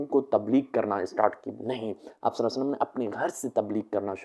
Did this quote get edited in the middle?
no; 0 cuts

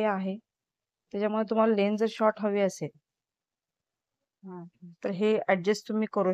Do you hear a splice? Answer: no; 0 cuts

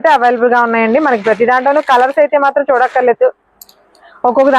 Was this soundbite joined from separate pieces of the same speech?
no; 0 cuts

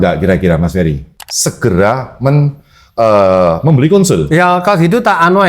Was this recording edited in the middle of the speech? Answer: yes; 1 cut; at 1.1 s

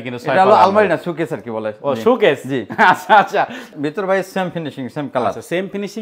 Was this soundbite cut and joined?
yes; 1 cut; at 3.7 s

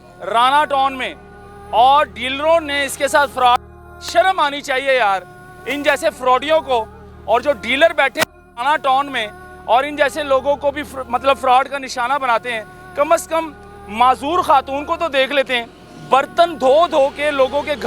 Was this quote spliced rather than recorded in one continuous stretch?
no; 0 cuts

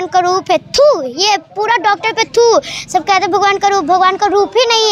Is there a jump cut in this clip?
no; 0 cuts

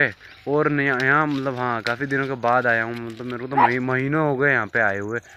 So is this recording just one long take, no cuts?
yes; 0 cuts

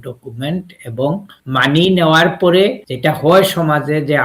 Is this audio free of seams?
no; 2 cuts; at 1.3 s, 2.9 s

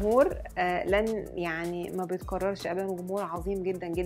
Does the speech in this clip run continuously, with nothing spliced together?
yes; 0 cuts

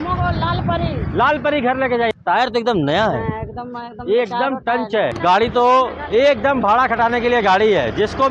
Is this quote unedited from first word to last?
no; 2 cuts; at 2.1 s, 5.1 s

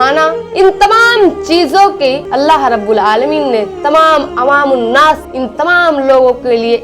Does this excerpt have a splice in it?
yes; 1 cut; at 2.2 s

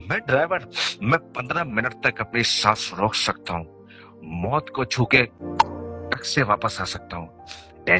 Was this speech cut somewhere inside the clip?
no; 0 cuts

